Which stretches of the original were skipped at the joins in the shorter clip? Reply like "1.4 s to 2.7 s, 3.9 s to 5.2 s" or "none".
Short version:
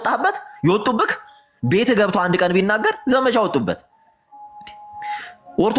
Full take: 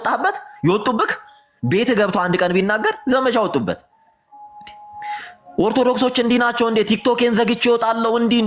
none